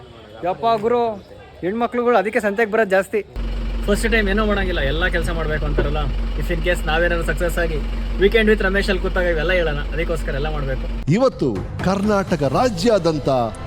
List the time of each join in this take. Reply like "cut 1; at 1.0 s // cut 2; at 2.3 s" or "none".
cut 1; at 3.4 s